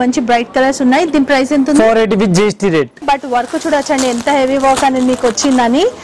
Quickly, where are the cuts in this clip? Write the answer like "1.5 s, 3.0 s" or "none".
3.0 s